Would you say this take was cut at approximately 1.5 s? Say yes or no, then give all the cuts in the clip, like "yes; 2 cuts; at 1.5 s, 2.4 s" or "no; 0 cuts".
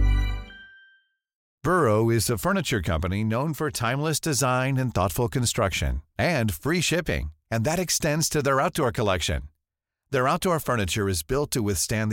yes; 1 cut; at 1.5 s